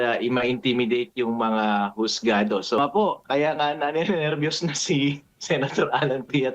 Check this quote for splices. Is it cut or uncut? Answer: cut